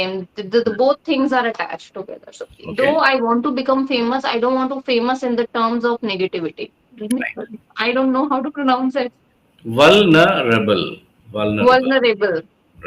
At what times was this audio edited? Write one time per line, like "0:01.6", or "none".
0:07.0